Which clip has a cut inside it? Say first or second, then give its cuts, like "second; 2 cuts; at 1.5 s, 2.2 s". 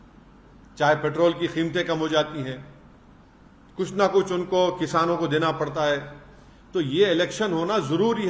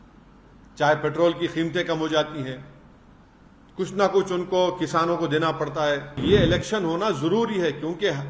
second; 1 cut; at 6.2 s